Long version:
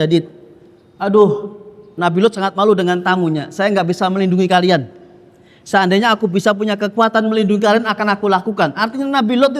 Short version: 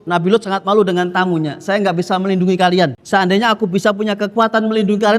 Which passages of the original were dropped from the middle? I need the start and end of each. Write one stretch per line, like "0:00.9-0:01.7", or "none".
0:04.9-0:05.6